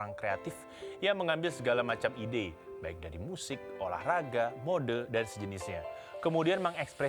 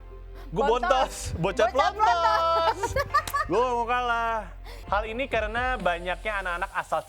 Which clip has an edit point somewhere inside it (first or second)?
second